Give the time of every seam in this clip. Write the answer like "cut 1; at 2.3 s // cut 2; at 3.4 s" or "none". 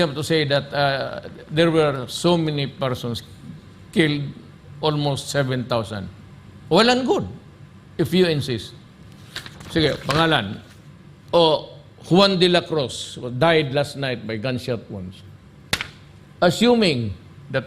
none